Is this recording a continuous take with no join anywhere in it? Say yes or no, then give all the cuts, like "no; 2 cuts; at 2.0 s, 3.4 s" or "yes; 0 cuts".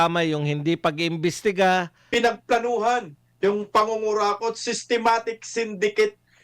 no; 1 cut; at 2.0 s